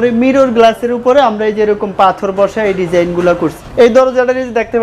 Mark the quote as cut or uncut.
cut